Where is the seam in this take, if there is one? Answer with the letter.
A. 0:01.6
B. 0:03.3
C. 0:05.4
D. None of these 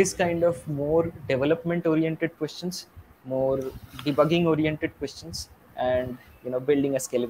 D